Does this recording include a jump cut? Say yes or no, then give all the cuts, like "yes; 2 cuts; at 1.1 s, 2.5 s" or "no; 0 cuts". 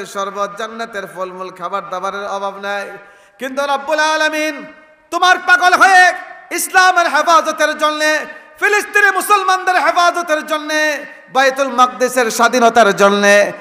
no; 0 cuts